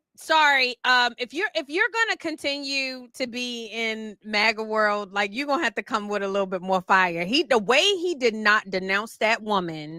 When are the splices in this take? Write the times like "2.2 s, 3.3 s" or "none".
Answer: none